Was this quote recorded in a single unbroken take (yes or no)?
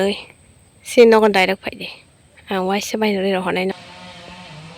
no